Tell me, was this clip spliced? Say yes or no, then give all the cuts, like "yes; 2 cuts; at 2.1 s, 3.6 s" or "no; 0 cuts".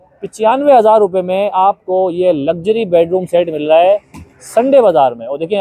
no; 0 cuts